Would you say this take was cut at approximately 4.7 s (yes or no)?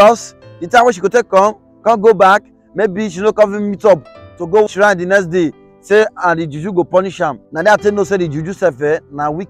yes